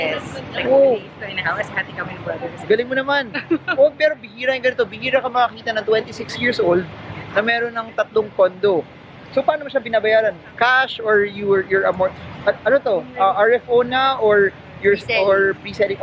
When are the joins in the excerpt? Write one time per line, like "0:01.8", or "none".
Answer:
none